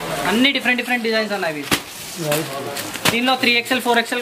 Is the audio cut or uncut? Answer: uncut